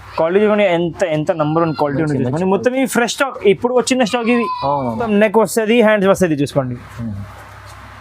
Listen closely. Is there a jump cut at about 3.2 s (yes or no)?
no